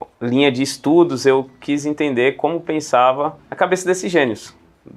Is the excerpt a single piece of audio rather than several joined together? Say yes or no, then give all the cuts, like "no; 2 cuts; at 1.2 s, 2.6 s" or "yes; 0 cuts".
yes; 0 cuts